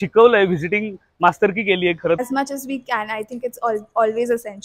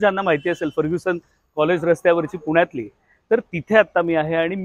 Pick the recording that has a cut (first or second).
first